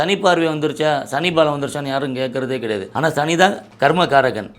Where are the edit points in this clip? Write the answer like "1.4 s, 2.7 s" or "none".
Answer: 2.9 s, 3.7 s